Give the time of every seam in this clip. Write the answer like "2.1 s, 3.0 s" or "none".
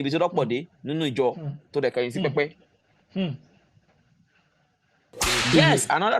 5.1 s